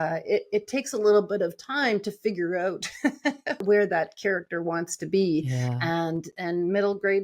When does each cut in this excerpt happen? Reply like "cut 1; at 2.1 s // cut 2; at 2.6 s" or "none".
cut 1; at 3.6 s